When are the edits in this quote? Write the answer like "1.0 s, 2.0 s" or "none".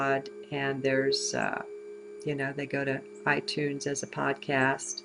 1.8 s